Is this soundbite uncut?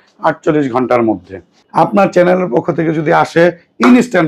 no; 1 cut; at 1.6 s

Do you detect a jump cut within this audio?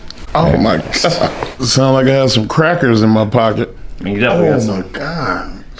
yes; 2 cuts; at 1.6 s, 3.9 s

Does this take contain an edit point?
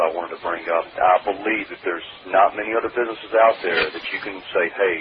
no; 0 cuts

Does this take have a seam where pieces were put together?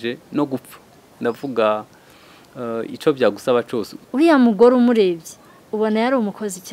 yes; 1 cut; at 3.9 s

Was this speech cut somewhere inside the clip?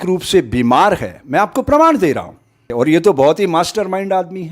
yes; 1 cut; at 2.7 s

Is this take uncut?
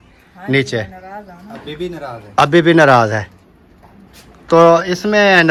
yes; 0 cuts

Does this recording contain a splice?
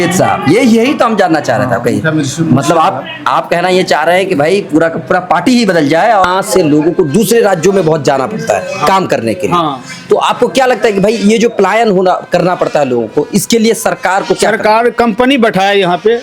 yes; 1 cut; at 6.2 s

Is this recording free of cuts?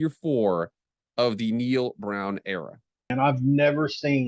no; 1 cut; at 3.1 s

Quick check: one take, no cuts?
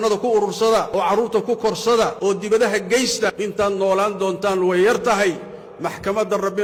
yes; 0 cuts

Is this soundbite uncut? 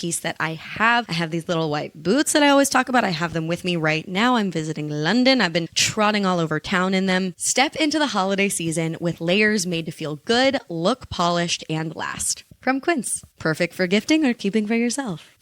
no; 2 cuts; at 1.1 s, 7.4 s

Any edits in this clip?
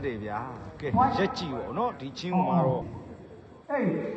no; 0 cuts

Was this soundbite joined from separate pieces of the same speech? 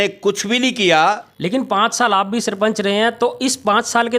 yes; 1 cut; at 1.3 s

